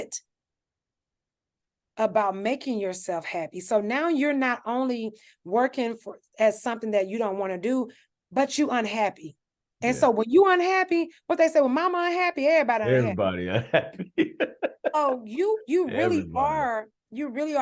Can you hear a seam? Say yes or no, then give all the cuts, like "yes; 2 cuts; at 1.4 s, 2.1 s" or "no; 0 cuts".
no; 0 cuts